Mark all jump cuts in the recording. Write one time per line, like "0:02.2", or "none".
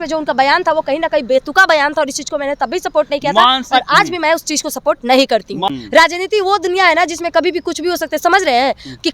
0:05.7